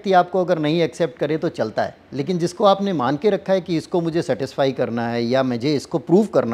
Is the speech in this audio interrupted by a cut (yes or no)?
no